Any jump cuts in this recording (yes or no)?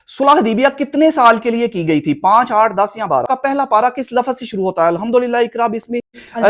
yes